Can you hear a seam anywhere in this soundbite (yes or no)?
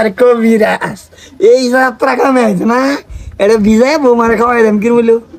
no